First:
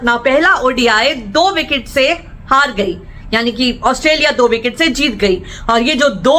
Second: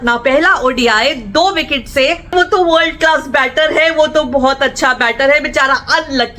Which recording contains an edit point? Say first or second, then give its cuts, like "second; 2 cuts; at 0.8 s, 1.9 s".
second; 1 cut; at 2.3 s